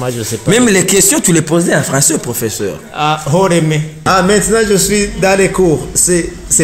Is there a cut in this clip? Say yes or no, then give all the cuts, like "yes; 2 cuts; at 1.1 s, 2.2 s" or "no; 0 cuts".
yes; 1 cut; at 4.0 s